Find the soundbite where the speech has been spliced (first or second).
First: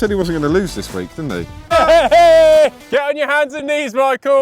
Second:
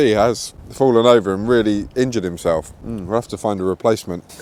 first